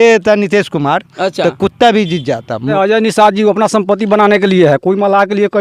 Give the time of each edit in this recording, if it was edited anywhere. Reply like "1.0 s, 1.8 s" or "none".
2.6 s